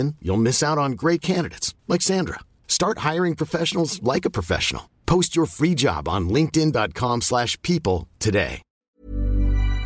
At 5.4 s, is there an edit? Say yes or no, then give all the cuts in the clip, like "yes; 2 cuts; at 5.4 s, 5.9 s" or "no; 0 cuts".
no; 1 cut; at 8.8 s